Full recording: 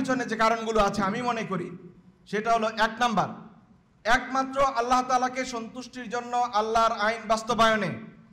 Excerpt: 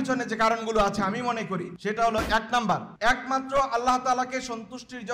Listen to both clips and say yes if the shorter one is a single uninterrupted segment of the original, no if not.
no